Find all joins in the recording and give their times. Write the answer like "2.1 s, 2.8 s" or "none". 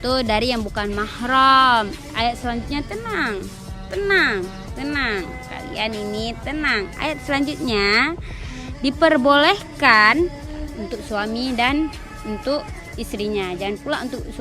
10.4 s